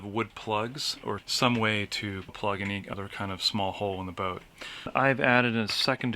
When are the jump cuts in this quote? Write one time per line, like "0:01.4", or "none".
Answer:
0:01.2
0:02.5
0:04.9